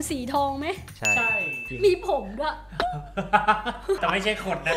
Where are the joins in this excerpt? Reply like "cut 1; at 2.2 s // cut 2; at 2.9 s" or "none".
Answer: none